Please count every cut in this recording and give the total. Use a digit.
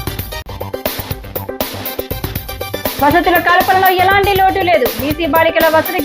1